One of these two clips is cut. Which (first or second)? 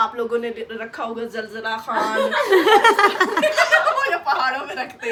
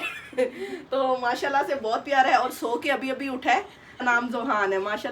second